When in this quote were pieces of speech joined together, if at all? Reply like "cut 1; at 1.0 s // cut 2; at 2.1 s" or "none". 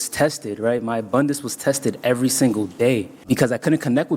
cut 1; at 3.2 s